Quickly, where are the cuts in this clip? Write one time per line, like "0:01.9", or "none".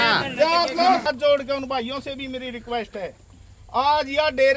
0:01.0

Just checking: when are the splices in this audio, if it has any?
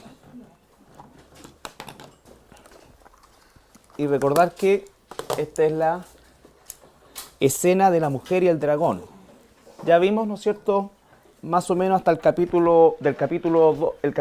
0:06.2

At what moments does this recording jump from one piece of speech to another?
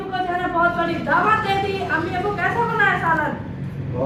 none

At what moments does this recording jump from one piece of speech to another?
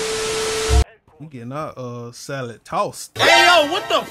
0:00.9

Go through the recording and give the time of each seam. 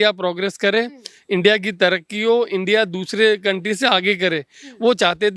none

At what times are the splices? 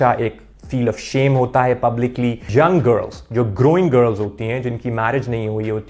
0:02.5

